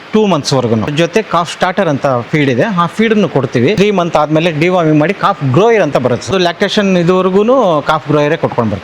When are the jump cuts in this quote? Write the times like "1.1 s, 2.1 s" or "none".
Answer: 0.9 s, 3.8 s, 6.3 s